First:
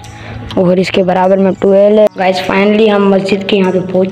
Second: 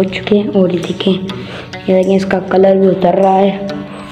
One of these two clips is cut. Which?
first; 1 cut; at 2.1 s

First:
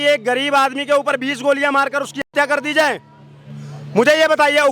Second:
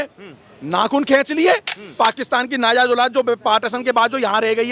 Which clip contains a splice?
second; 1 cut; at 1.8 s

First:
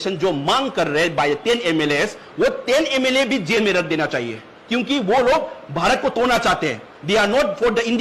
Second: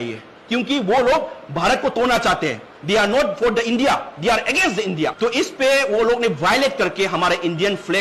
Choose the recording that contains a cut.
second; 1 cut; at 5.1 s

